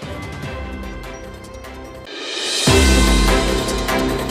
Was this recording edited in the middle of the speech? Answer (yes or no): no